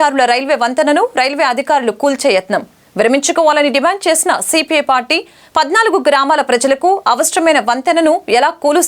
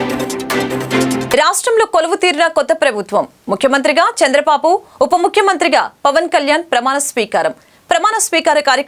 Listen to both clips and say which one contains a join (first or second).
second